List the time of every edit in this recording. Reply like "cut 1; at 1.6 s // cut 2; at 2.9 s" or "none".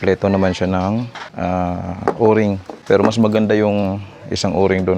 cut 1; at 1.2 s // cut 2; at 2.7 s